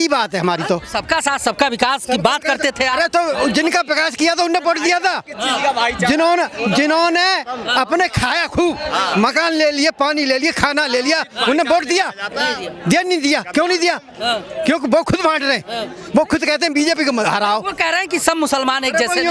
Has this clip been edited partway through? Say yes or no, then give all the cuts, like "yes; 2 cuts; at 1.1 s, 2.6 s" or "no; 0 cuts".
no; 0 cuts